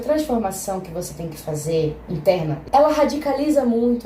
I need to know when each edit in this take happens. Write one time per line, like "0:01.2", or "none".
0:02.6